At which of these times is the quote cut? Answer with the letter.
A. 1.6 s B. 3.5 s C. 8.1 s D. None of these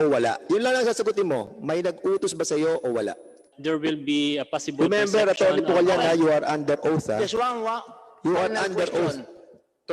B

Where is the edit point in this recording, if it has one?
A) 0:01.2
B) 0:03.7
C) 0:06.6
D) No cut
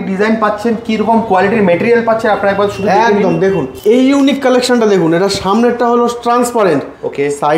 B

